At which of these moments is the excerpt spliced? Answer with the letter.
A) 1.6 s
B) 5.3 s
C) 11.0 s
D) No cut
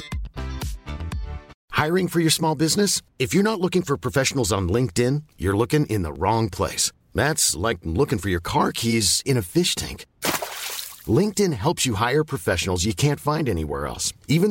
A